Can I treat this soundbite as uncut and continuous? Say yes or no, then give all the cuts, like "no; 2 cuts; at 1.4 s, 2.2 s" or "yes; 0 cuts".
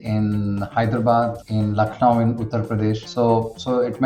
no; 2 cuts; at 1.4 s, 3.0 s